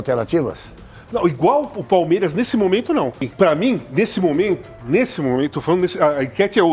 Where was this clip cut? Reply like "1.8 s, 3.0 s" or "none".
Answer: 3.3 s